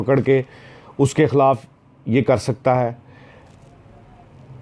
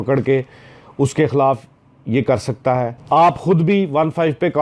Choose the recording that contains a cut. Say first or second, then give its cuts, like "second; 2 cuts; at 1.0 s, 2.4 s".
second; 1 cut; at 3.0 s